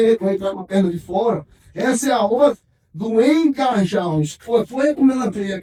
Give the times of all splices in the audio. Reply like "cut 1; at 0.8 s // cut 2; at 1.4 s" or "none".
none